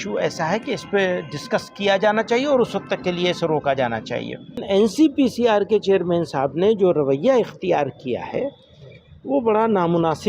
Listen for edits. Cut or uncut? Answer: cut